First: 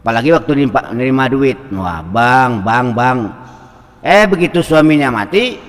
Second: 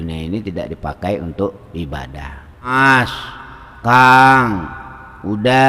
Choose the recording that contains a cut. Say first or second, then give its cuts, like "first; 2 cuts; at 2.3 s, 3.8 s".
second; 1 cut; at 2.7 s